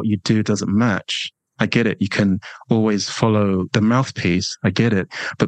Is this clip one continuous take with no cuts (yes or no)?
no